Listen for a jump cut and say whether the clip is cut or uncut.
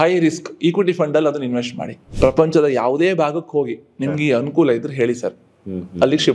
cut